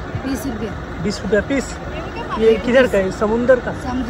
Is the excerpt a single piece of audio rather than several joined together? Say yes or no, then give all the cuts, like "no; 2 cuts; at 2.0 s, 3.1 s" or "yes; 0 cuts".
yes; 0 cuts